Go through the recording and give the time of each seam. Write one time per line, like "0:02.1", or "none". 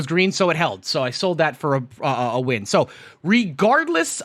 none